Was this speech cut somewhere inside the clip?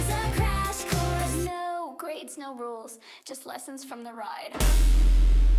no; 0 cuts

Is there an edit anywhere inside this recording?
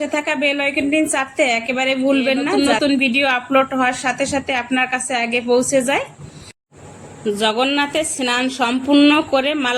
yes; 1 cut; at 2.5 s

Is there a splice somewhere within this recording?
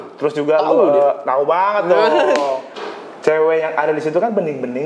yes; 1 cut; at 2.7 s

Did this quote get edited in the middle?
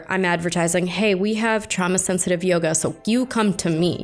yes; 1 cut; at 1.7 s

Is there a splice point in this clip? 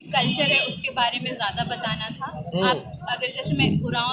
no; 0 cuts

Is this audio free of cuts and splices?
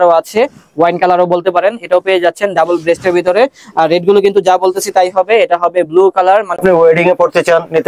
no; 1 cut; at 6.6 s

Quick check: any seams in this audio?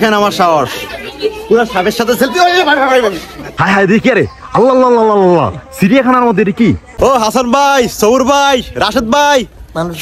yes; 2 cuts; at 3.6 s, 6.9 s

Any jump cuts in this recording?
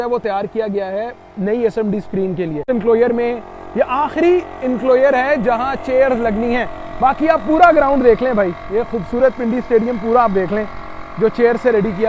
no; 0 cuts

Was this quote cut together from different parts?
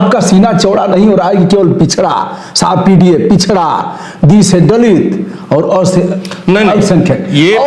no; 0 cuts

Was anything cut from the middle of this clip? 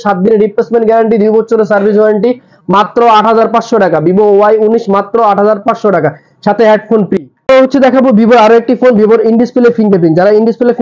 no; 0 cuts

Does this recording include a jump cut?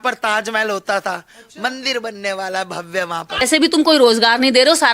yes; 1 cut; at 3.4 s

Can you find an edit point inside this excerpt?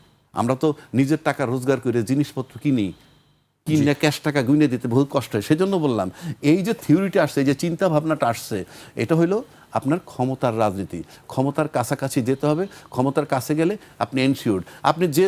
no; 0 cuts

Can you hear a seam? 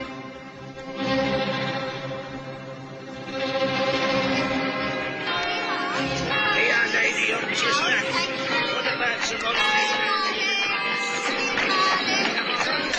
no; 0 cuts

